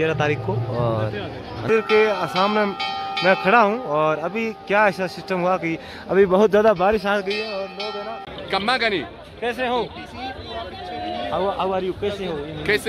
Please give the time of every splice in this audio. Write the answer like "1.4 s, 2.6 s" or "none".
1.7 s, 8.3 s